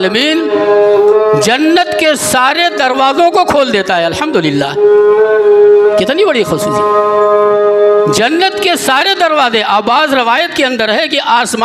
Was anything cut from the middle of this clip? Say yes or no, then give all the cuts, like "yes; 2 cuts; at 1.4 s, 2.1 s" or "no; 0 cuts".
no; 0 cuts